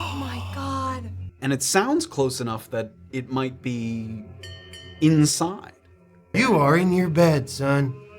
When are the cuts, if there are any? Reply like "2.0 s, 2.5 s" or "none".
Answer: 1.2 s, 6.3 s